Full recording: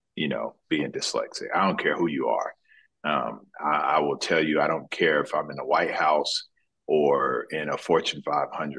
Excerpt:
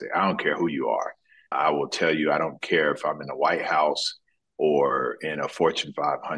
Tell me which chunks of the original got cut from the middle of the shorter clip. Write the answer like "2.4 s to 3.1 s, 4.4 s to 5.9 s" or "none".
2.9 s to 3.8 s